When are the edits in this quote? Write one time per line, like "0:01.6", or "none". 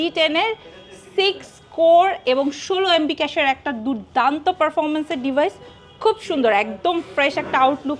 none